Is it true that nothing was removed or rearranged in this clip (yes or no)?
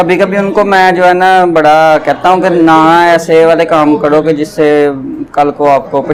yes